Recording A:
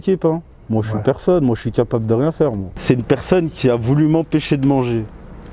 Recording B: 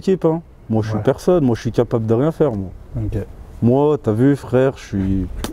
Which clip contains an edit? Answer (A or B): A